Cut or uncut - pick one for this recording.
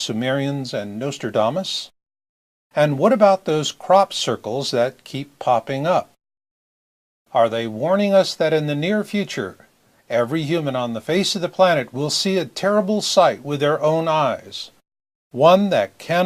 cut